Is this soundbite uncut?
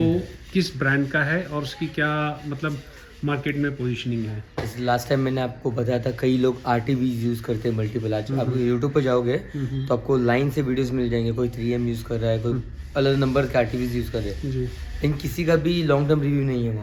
yes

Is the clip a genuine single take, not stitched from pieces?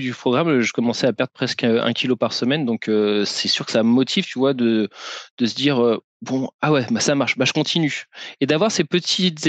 yes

